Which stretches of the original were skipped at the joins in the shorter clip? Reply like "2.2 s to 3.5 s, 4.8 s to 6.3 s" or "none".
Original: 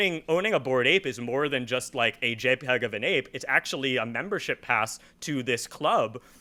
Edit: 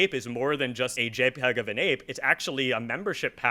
1.9 s to 2.2 s